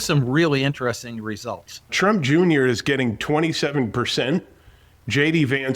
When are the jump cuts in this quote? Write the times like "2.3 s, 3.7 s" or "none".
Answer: 1.8 s

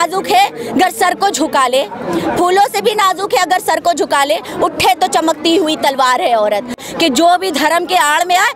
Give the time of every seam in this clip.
6.8 s

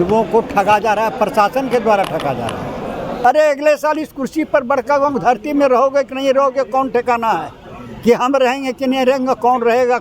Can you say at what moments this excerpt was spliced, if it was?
3.1 s

